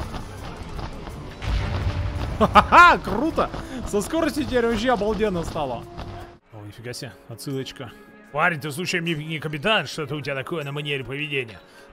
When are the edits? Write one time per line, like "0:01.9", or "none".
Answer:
0:06.3